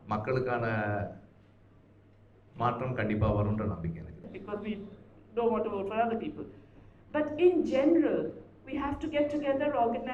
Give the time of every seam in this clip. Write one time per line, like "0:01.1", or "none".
0:04.3